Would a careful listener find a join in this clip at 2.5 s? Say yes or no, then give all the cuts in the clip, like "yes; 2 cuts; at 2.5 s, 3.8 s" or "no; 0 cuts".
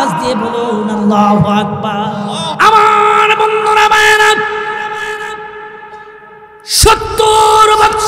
yes; 1 cut; at 2.5 s